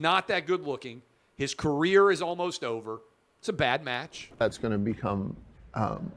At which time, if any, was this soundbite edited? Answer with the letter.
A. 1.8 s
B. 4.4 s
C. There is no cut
B